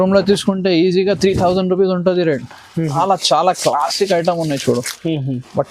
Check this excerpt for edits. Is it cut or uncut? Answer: cut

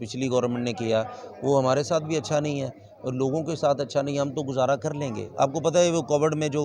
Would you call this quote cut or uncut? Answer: uncut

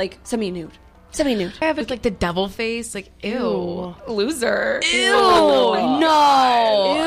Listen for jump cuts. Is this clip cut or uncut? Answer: cut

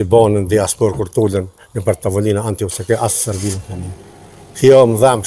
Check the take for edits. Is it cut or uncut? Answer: uncut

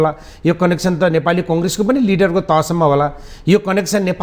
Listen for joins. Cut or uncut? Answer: uncut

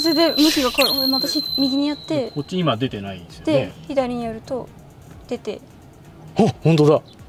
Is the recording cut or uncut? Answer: uncut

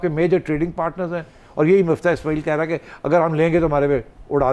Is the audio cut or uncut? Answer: uncut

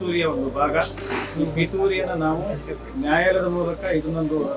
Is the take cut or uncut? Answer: uncut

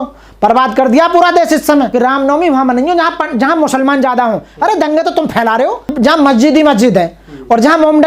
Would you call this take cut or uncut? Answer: cut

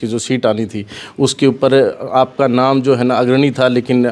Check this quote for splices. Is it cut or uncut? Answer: uncut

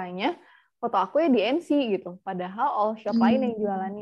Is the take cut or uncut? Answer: uncut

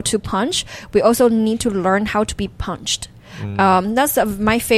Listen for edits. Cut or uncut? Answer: uncut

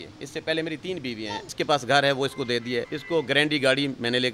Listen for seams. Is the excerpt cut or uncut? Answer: cut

